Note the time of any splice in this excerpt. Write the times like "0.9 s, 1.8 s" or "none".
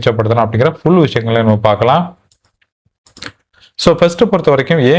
none